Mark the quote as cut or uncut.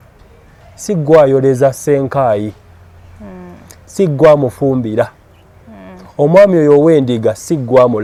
uncut